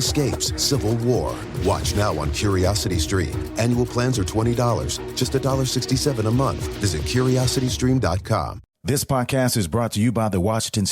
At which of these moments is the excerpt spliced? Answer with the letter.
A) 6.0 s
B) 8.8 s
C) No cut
B